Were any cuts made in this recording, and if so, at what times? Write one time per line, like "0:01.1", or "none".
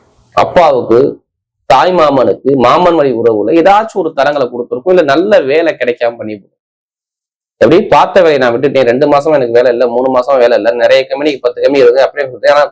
none